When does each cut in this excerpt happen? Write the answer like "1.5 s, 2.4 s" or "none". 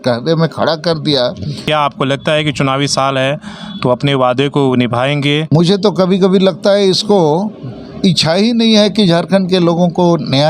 1.6 s, 5.4 s

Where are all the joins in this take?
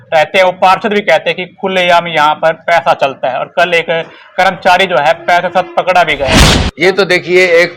6.6 s

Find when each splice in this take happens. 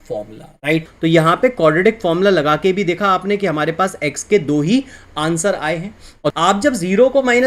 0.9 s, 6.2 s

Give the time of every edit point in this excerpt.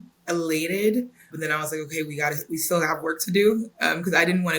1.3 s

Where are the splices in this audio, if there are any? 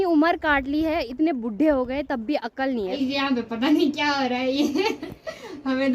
3.0 s

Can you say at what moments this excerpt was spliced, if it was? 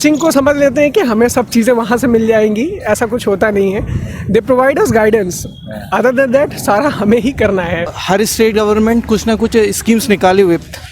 7.9 s

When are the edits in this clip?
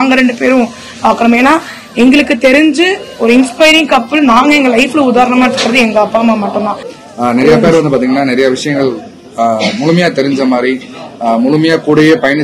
6.9 s

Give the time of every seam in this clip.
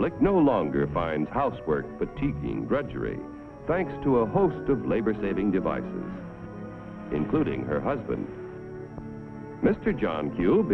none

